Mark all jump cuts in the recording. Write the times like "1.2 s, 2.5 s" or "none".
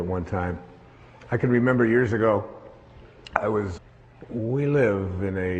none